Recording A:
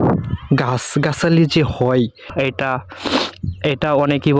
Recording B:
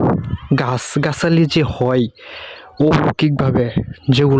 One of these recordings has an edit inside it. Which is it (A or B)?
A